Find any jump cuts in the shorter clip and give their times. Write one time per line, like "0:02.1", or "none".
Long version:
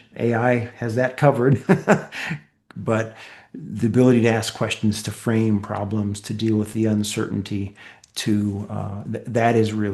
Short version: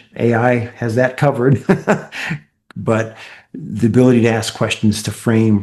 none